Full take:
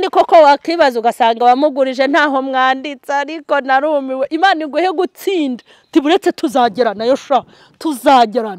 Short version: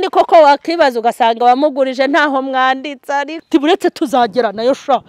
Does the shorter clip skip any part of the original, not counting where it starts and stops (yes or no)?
yes